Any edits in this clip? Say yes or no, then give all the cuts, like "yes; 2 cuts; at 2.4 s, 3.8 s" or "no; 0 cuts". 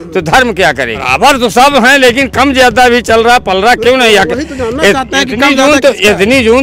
yes; 1 cut; at 1.0 s